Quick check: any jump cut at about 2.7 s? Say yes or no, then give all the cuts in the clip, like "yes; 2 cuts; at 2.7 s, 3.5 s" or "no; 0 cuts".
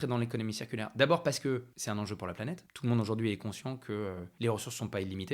yes; 3 cuts; at 1.7 s, 2.7 s, 4.2 s